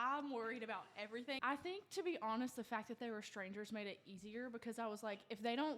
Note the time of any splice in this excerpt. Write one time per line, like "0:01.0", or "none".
0:01.4